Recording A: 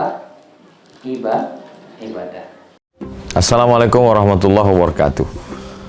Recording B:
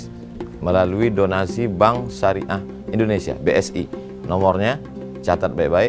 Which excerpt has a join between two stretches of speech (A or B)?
A